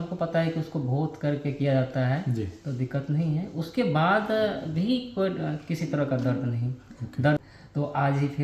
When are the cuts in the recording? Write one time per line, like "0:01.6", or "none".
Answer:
0:07.4